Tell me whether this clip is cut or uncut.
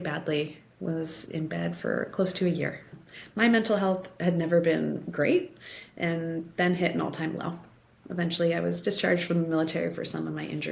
cut